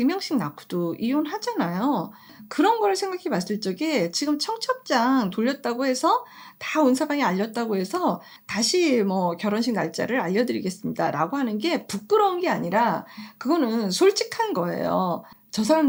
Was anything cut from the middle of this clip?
no; 0 cuts

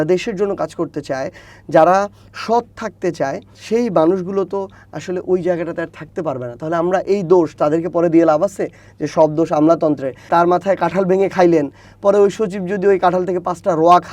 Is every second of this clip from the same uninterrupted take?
no; 2 cuts; at 3.5 s, 10.3 s

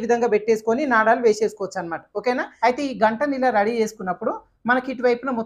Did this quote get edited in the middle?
yes; 1 cut; at 2.5 s

